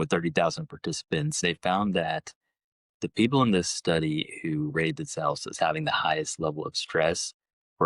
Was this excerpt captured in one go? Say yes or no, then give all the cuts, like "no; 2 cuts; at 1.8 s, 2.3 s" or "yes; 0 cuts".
no; 1 cut; at 1.4 s